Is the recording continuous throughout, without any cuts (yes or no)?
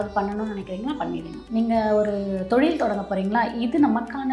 no